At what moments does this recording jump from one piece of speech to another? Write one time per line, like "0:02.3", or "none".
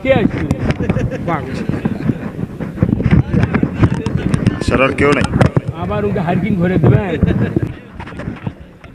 0:07.7